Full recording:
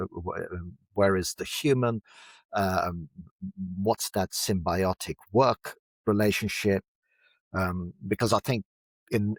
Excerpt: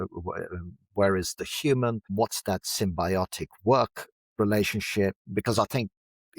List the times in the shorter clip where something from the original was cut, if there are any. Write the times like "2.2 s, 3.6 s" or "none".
2.1 s, 5.2 s